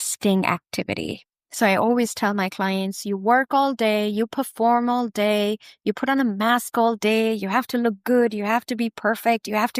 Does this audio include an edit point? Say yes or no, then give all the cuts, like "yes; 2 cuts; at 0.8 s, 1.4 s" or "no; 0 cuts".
no; 0 cuts